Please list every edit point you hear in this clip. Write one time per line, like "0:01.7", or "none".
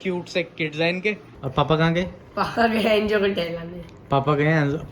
0:01.3